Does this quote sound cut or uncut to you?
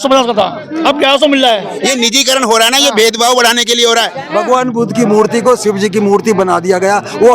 cut